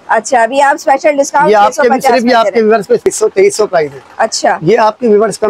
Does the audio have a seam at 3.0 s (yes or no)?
yes